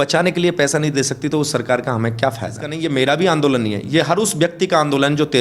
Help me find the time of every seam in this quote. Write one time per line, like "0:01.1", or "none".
0:02.7